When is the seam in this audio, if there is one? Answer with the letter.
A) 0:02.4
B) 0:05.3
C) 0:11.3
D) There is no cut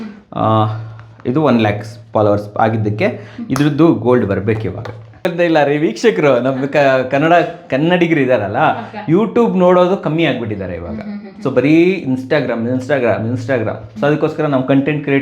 B